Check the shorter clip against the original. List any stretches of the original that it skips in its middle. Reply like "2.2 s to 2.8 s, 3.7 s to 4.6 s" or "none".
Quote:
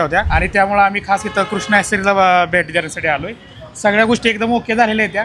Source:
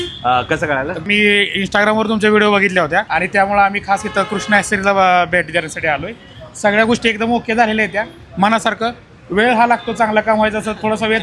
none